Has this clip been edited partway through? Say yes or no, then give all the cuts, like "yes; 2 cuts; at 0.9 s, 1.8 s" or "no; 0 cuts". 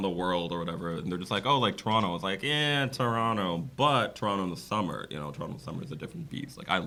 no; 0 cuts